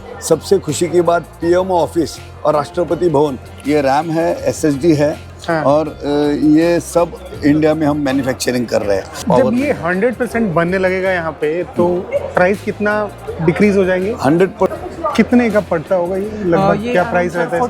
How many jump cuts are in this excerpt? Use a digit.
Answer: 3